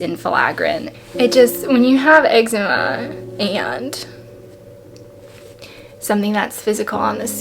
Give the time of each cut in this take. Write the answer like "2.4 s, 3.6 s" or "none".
0.9 s